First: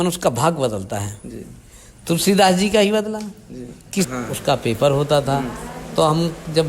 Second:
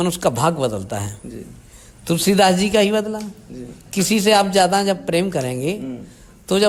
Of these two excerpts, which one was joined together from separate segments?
first; 1 cut; at 4.1 s

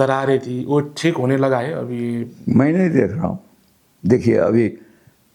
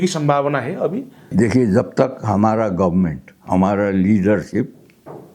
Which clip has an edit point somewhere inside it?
second; 1 cut; at 1.2 s

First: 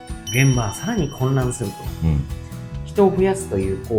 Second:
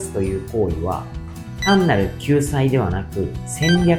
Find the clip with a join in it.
first; 1 cut; at 2.5 s

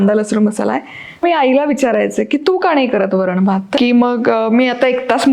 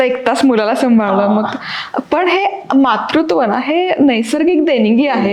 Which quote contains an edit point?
first; 2 cuts; at 1.2 s, 3.7 s

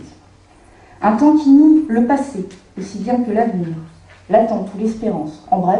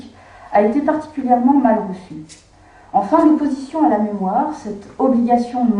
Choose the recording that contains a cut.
first; 1 cut; at 3.0 s

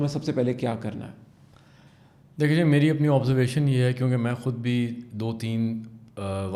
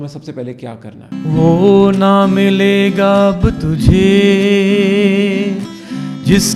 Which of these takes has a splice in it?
second; 1 cut; at 1.1 s

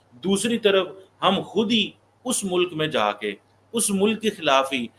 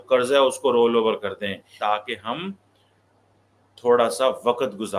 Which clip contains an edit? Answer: second; 1 cut; at 1.7 s

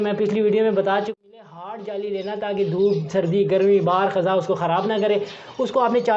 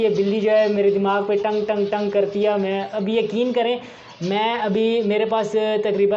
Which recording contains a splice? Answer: first; 1 cut; at 1.1 s

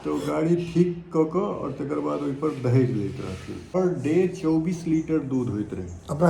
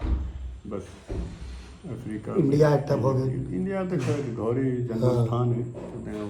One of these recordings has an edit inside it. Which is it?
first; 1 cut; at 3.7 s

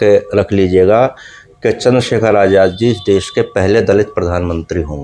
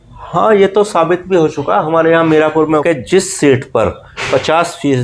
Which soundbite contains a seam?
second; 1 cut; at 2.8 s

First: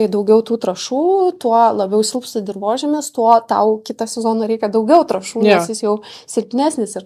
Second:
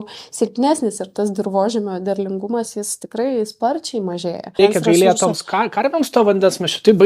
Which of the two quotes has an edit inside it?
second; 1 cut; at 4.6 s

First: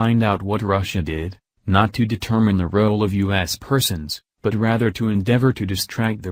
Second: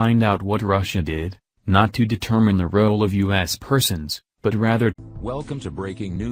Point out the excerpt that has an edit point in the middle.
first; 1 cut; at 5.0 s

